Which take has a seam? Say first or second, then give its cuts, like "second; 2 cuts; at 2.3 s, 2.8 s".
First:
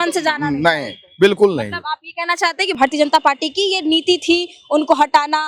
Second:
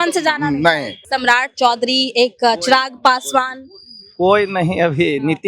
second; 1 cut; at 1.0 s